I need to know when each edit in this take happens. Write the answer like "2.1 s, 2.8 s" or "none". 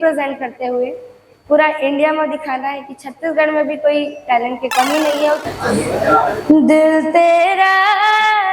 5.5 s